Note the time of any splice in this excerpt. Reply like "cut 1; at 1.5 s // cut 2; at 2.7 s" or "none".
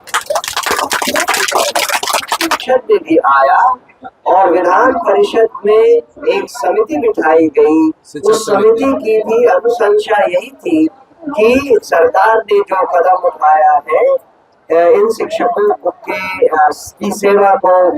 cut 1; at 2.6 s